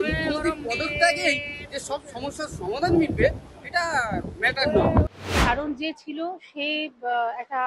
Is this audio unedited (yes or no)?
no